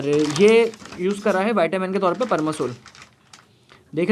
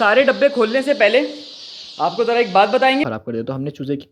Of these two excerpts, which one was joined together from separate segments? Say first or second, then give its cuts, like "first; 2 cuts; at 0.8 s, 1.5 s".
second; 1 cut; at 3.1 s